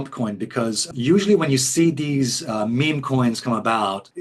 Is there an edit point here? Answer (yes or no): no